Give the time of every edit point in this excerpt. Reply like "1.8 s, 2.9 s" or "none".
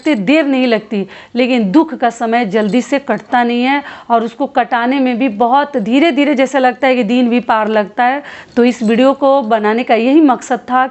8.4 s